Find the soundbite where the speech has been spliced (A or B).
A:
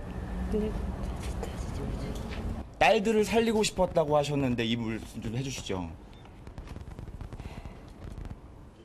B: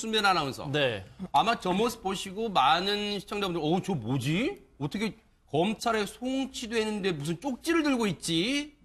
A